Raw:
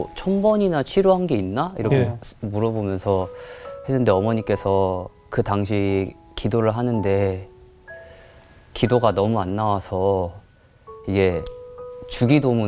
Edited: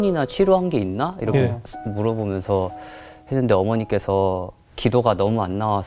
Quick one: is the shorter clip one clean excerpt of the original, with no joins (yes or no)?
no